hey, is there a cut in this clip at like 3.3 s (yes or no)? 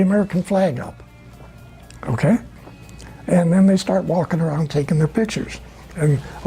no